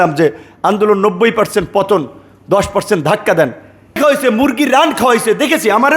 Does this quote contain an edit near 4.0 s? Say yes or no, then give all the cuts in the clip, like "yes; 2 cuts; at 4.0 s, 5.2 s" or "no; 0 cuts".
yes; 1 cut; at 4.0 s